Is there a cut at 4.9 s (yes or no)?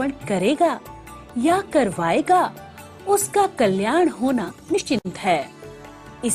yes